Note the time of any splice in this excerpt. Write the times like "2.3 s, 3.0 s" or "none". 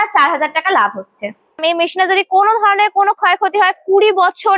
1.6 s